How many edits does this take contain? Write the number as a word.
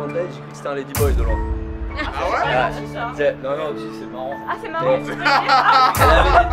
zero